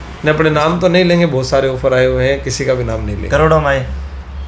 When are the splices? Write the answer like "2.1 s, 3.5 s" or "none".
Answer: none